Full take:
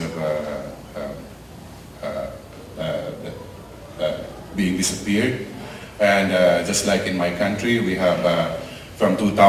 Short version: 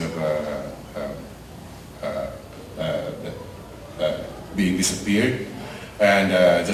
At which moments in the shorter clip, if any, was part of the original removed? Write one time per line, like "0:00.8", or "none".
none